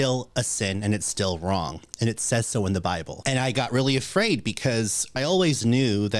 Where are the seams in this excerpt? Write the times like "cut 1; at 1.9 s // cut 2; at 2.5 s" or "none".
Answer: cut 1; at 3.1 s // cut 2; at 5.2 s